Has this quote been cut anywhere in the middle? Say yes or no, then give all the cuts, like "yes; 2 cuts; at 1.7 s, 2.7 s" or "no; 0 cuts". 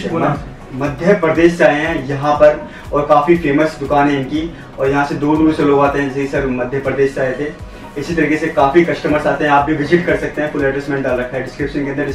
no; 0 cuts